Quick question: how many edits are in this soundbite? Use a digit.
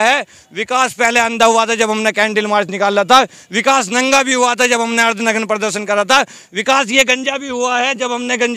0